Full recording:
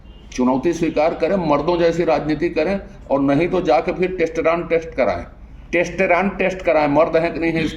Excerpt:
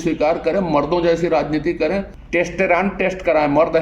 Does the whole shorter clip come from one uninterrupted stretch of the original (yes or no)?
no